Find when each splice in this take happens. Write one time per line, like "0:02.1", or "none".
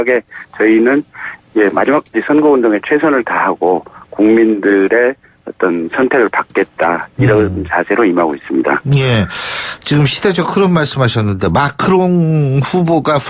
0:02.5